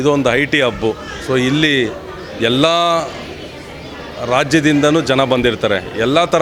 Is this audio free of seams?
yes; 0 cuts

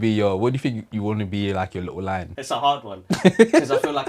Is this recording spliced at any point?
yes; 1 cut; at 2.6 s

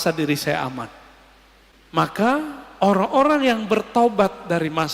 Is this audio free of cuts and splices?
no; 1 cut; at 1.8 s

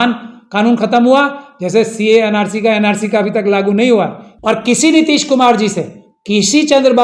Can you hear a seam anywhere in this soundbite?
yes; 1 cut; at 4.2 s

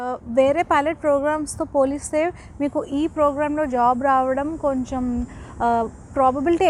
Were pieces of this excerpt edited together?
no; 0 cuts

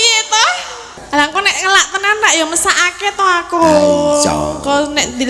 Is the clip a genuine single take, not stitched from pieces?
no; 1 cut; at 0.9 s

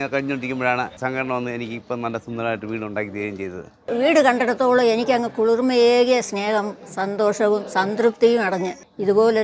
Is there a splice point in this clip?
yes; 2 cuts; at 1.0 s, 3.7 s

